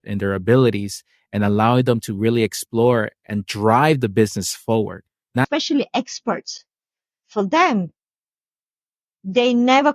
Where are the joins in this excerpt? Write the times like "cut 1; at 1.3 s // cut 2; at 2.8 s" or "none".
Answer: cut 1; at 5.5 s